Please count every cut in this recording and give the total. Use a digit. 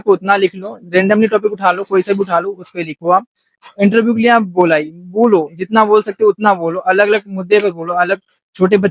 0